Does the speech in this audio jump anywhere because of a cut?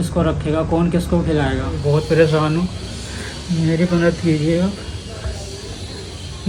yes; 1 cut; at 1.8 s

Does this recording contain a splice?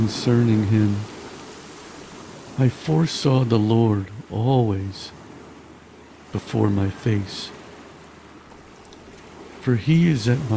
no; 0 cuts

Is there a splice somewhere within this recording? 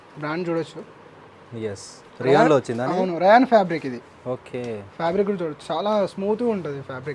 no; 0 cuts

